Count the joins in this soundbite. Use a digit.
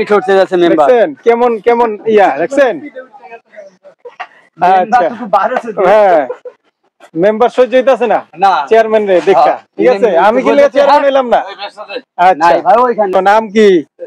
1